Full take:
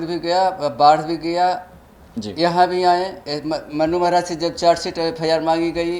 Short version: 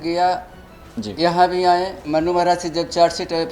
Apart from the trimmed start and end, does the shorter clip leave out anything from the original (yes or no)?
yes